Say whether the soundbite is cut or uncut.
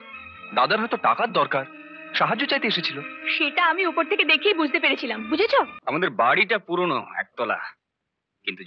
cut